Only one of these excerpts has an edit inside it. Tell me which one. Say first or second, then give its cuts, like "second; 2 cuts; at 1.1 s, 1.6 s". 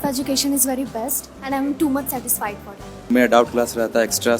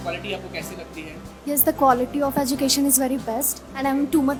first; 1 cut; at 3.1 s